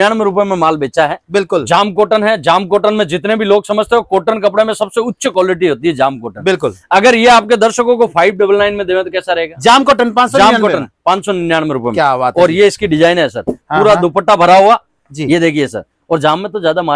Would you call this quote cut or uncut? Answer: uncut